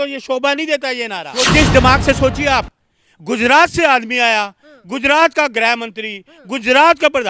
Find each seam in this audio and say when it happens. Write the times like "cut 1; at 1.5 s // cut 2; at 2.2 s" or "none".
cut 1; at 1.4 s